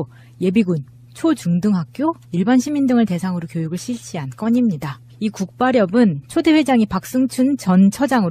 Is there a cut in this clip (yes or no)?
yes